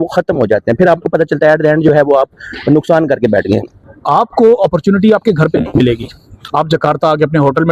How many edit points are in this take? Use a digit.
1